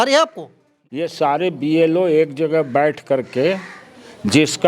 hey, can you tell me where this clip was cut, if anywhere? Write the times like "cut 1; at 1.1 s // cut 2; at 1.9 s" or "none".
cut 1; at 1.0 s